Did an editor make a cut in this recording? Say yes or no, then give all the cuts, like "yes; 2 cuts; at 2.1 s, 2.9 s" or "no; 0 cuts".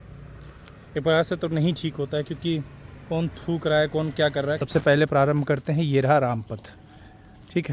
yes; 1 cut; at 4.6 s